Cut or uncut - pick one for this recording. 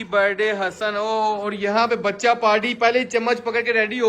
uncut